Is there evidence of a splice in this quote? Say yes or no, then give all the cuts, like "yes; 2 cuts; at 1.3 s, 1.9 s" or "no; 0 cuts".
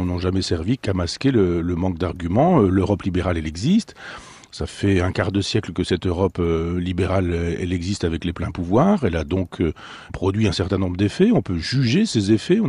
no; 0 cuts